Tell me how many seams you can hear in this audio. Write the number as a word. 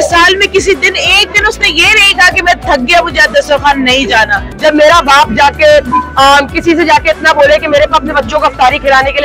one